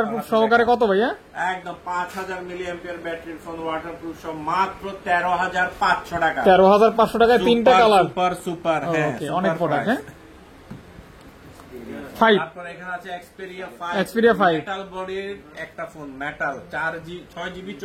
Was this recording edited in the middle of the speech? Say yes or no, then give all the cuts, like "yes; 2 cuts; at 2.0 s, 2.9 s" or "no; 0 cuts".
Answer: no; 0 cuts